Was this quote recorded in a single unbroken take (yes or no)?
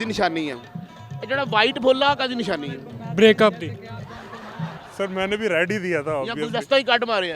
no